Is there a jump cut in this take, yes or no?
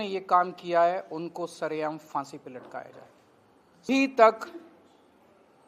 yes